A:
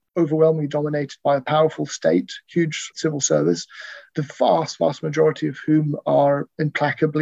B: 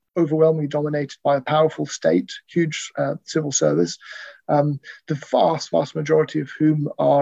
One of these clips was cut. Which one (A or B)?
A